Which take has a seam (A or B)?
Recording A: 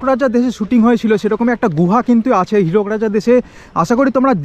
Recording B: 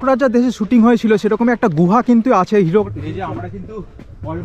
B